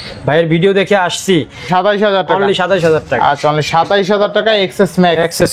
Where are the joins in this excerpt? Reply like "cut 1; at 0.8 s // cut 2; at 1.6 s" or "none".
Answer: cut 1; at 1.7 s